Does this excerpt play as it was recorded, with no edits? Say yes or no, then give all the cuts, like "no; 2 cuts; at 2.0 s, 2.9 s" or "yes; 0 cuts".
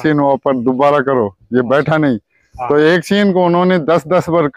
yes; 0 cuts